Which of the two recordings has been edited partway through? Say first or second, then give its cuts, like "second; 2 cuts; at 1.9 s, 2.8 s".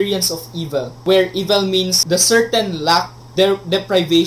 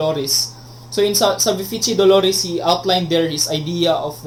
first; 3 cuts; at 1.0 s, 2.0 s, 3.2 s